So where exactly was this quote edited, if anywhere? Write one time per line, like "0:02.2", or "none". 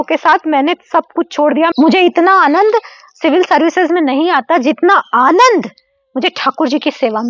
0:01.7